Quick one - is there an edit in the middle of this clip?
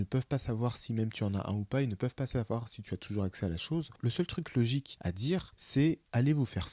no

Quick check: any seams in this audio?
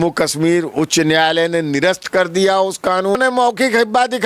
yes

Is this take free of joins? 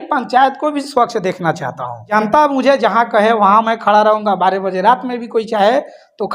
no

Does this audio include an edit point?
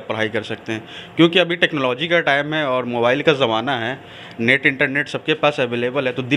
no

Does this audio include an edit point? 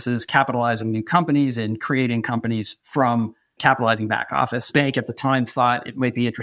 yes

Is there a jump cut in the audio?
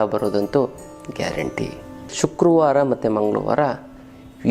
yes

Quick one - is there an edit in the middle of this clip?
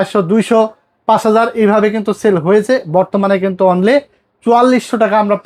no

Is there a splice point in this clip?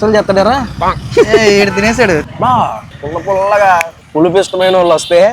yes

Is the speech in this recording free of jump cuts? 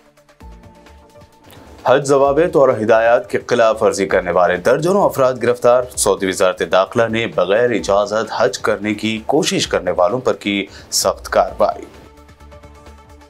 no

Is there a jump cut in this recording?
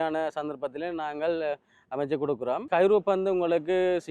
yes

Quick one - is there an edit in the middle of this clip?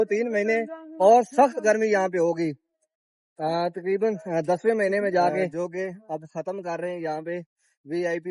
yes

